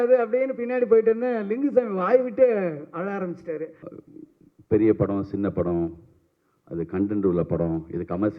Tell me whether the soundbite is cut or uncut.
cut